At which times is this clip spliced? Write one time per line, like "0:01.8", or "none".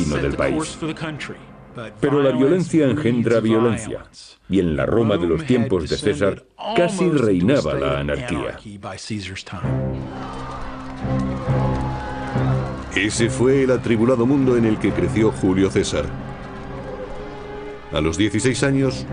0:14.6